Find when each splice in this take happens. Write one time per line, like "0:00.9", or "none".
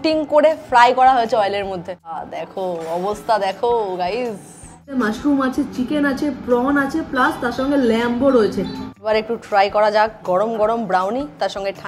0:01.7
0:04.9
0:08.9